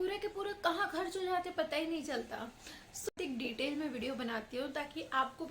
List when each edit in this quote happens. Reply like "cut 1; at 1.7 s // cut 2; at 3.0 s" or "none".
cut 1; at 3.2 s